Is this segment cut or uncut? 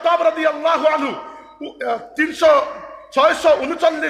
uncut